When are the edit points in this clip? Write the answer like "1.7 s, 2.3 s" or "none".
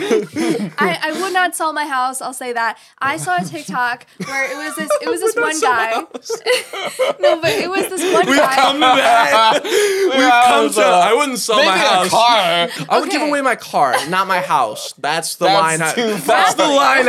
12.8 s